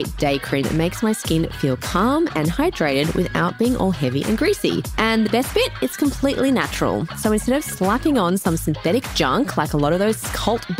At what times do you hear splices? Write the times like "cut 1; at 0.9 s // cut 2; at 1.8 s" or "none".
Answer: none

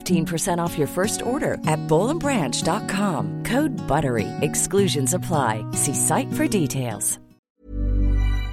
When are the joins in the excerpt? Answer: cut 1; at 7.5 s

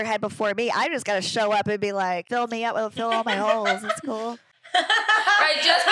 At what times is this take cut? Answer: cut 1; at 2.2 s // cut 2; at 4.7 s

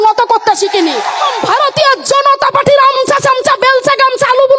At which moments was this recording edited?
cut 1; at 1.3 s

